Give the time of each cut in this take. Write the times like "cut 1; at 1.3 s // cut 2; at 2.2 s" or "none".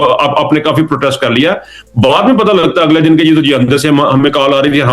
none